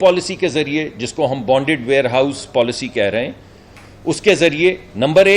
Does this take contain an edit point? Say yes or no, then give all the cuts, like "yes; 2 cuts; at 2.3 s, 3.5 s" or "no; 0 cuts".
yes; 1 cut; at 1.4 s